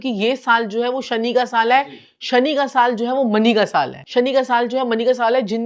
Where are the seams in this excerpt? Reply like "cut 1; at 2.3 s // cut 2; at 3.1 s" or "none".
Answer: cut 1; at 4.0 s